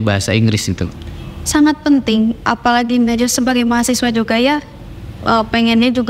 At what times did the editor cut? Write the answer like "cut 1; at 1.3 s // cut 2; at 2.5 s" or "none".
none